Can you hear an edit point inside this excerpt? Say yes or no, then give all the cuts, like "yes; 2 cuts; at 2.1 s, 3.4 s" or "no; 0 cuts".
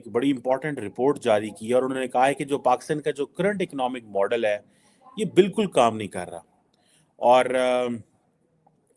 no; 0 cuts